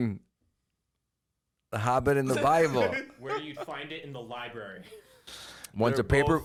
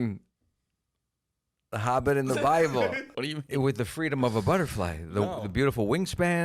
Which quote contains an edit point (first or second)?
second